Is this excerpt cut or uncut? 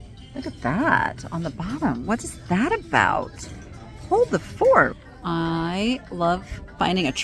cut